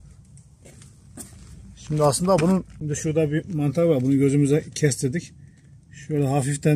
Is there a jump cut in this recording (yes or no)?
yes